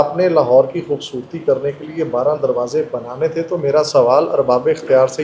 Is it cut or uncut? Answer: uncut